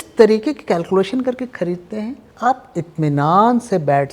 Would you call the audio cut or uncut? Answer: cut